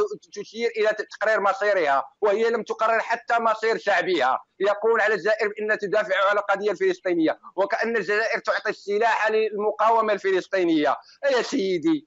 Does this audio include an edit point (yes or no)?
no